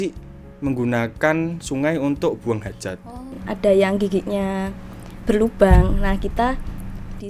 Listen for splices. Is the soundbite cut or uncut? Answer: cut